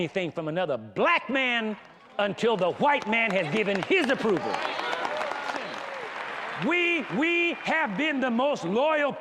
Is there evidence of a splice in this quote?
yes; 1 cut; at 5.9 s

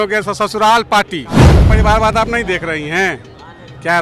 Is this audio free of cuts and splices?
no; 1 cut; at 1.6 s

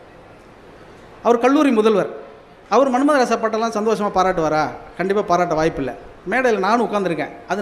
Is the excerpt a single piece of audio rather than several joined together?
yes; 0 cuts

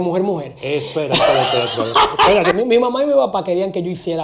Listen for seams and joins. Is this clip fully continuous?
no; 1 cut; at 2.5 s

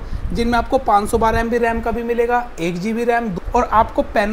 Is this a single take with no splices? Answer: no; 1 cut; at 3.3 s

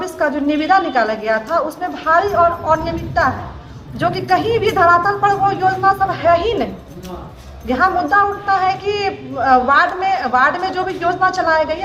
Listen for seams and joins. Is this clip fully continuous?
yes; 0 cuts

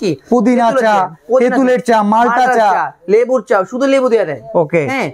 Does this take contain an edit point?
no; 0 cuts

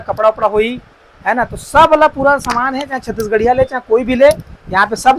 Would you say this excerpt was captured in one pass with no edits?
yes; 0 cuts

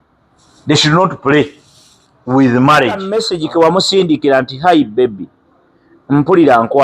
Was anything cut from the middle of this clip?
yes; 1 cut; at 3.2 s

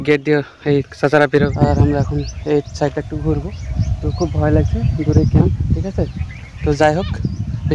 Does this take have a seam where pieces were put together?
no; 0 cuts

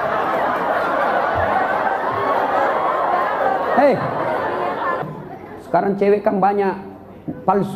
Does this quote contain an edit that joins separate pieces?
yes; 1 cut; at 5.0 s

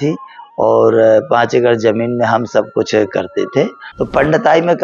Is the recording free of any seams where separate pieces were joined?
no; 1 cut; at 3.9 s

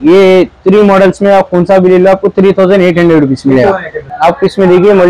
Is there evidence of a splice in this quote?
yes; 1 cut; at 4.1 s

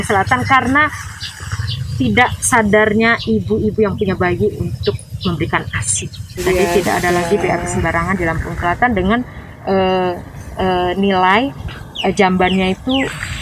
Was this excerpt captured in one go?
no; 1 cut; at 6.4 s

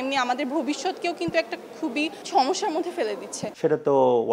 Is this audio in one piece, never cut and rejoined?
no; 1 cut; at 3.4 s

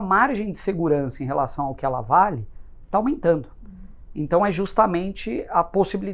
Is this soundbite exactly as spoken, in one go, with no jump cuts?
yes; 0 cuts

